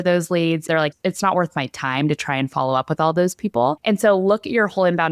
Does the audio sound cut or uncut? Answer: cut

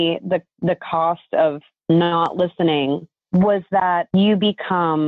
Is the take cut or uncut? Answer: cut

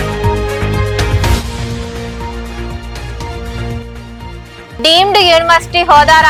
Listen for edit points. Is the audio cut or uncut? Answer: uncut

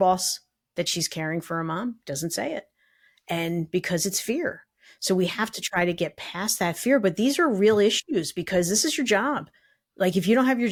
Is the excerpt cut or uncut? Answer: uncut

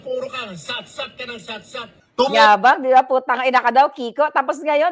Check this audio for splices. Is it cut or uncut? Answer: uncut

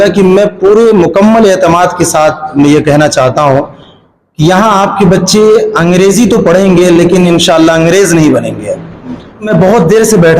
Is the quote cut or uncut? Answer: cut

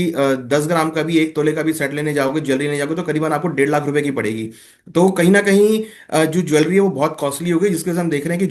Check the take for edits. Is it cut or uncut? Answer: uncut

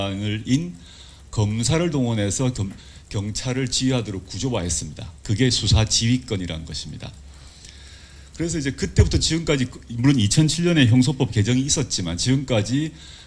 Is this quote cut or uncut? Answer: cut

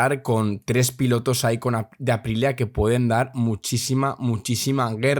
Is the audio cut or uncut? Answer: uncut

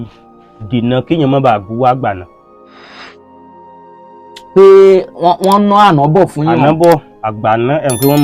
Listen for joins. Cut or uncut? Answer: uncut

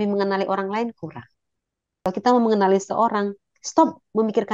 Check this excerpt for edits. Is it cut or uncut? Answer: cut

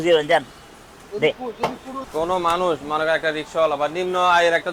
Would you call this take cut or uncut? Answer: cut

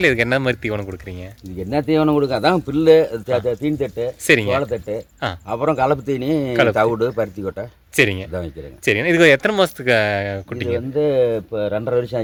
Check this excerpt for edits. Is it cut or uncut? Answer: uncut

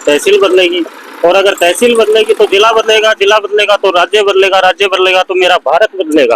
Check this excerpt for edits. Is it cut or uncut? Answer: uncut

